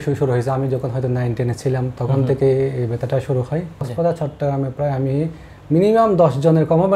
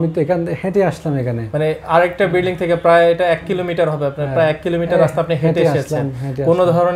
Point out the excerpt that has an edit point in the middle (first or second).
first